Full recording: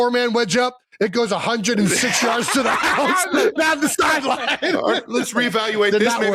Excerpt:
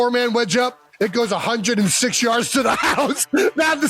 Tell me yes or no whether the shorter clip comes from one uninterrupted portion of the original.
yes